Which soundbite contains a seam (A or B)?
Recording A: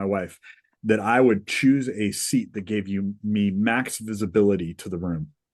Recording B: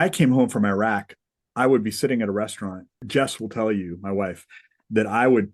B